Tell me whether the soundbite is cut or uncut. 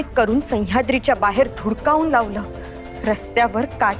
cut